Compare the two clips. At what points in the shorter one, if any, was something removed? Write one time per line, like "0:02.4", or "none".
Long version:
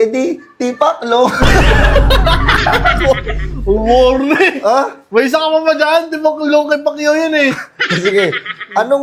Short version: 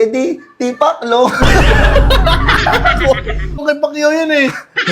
0:03.6